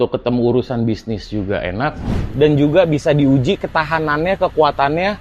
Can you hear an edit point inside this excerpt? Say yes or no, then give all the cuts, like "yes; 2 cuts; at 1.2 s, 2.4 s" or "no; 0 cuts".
yes; 1 cut; at 2.1 s